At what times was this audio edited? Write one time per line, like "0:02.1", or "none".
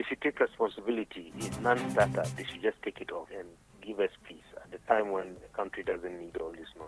0:01.5
0:03.3